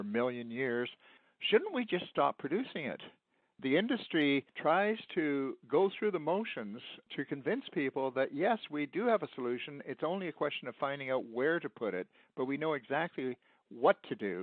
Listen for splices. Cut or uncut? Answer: cut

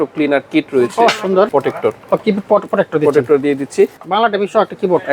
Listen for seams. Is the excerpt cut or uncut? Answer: cut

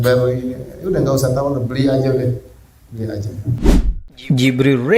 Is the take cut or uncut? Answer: cut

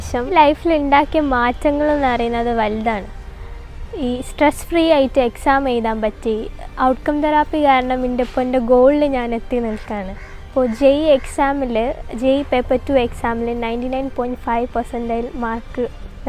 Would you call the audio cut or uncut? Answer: uncut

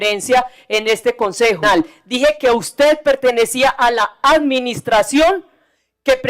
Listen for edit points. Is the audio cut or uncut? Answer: cut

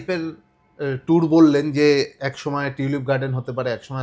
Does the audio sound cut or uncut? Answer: uncut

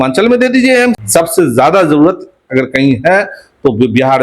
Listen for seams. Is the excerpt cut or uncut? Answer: cut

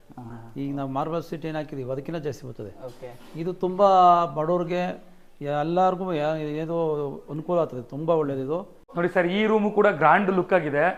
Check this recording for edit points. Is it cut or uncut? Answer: cut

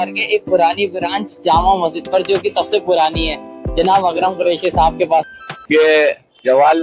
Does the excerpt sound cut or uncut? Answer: cut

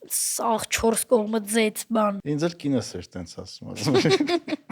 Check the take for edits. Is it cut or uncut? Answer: cut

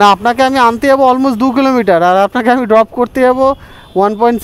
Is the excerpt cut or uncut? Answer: uncut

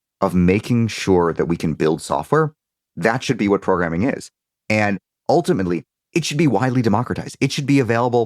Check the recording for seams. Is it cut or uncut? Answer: cut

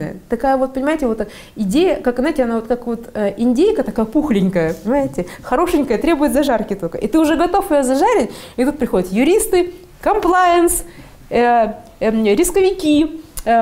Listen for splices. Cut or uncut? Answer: uncut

